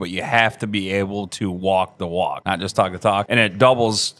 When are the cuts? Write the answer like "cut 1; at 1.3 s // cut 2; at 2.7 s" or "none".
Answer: cut 1; at 2.4 s // cut 2; at 3.3 s